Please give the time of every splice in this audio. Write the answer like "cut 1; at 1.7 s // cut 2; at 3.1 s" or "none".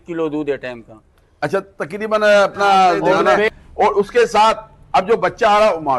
cut 1; at 3.4 s